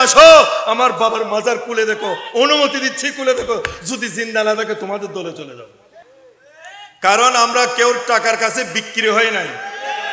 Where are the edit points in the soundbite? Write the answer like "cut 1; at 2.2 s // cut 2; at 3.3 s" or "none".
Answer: cut 1; at 6.0 s